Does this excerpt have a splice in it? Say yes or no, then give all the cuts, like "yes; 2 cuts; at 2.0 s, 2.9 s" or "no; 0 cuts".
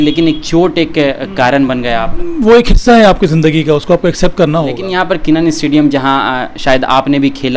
yes; 2 cuts; at 2.2 s, 4.8 s